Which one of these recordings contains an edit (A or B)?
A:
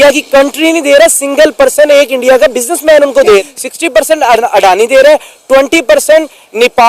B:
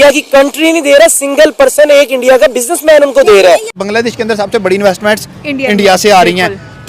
B